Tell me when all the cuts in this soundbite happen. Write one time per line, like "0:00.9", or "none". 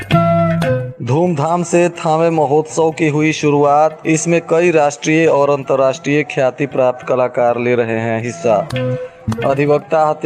0:00.9